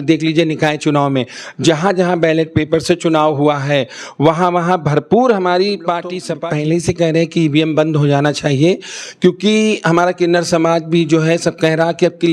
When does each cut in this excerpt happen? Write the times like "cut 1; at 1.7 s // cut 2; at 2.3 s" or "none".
cut 1; at 6.3 s